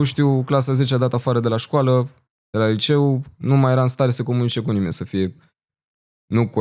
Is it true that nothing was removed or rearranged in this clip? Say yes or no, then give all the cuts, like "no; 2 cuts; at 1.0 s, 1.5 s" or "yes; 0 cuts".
yes; 0 cuts